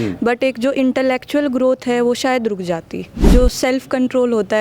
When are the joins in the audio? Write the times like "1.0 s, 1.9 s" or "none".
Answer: 3.2 s